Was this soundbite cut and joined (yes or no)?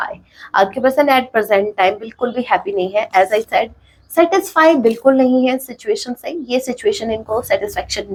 no